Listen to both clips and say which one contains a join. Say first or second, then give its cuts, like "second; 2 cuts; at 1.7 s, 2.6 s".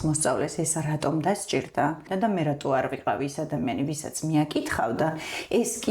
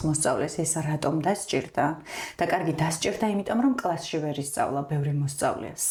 first; 1 cut; at 2.0 s